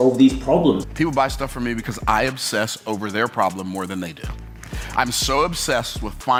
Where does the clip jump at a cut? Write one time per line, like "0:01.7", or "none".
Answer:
none